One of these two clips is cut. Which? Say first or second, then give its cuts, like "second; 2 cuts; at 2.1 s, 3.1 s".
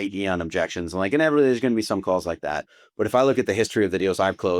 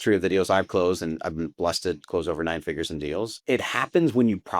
second; 1 cut; at 3.4 s